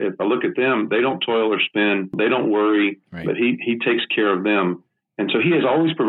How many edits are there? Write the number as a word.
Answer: one